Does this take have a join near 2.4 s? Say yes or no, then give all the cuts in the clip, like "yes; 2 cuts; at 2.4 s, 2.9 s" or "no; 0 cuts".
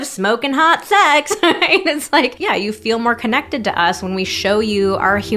yes; 1 cut; at 2.4 s